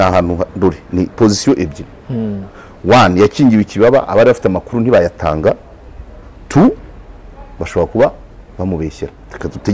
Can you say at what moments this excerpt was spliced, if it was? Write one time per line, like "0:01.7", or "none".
none